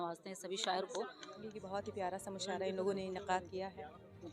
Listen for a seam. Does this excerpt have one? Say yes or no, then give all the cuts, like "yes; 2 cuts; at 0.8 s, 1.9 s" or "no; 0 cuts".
yes; 1 cut; at 1.5 s